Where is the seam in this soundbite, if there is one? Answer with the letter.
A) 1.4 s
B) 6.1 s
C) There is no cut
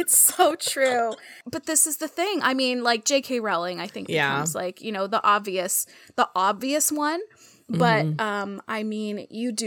A